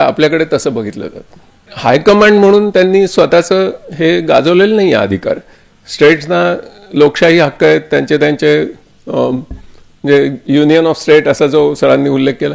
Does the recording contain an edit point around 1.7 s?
yes; 1 cut; at 1.7 s

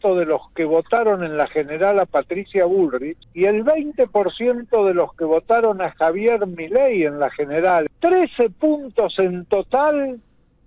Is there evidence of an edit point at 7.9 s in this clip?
yes; 2 cuts; at 3.2 s, 7.9 s

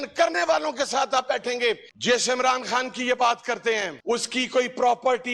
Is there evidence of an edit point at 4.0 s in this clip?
no; 1 cut; at 1.9 s

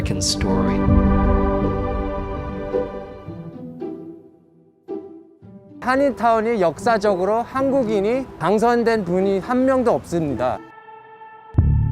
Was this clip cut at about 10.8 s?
yes; 1 cut; at 10.8 s

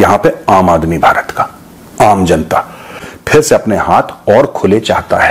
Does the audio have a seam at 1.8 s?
no; 1 cut; at 3.1 s

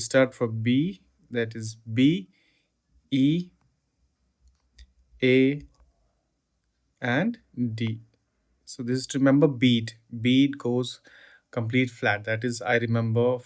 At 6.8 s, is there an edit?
no; 0 cuts

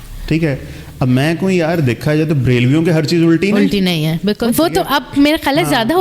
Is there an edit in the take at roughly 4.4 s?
yes; 1 cut; at 4.4 s

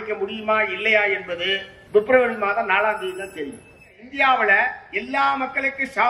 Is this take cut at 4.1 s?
yes; 2 cuts; at 1.7 s, 4.1 s

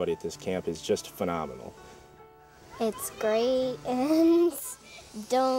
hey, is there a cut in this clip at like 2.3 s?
yes; 1 cut; at 2.3 s

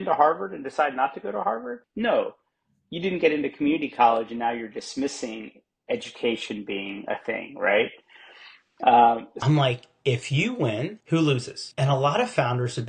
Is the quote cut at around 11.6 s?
yes; 4 cuts; at 1.8 s, 9.3 s, 11.0 s, 11.6 s

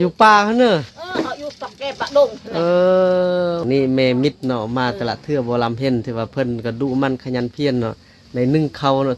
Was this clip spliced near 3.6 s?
yes; 1 cut; at 3.6 s

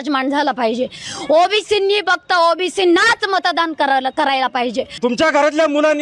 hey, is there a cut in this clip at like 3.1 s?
no; 1 cut; at 5.0 s

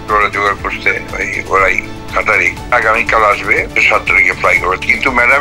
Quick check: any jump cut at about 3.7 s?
yes; 2 cuts; at 2.7 s, 3.7 s

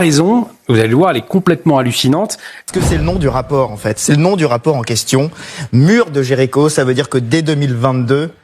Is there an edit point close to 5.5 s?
no; 1 cut; at 2.6 s

